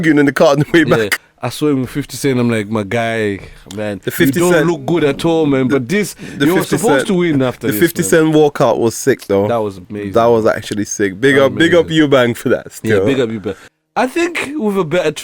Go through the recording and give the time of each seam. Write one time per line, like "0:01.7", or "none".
0:01.2
0:13.6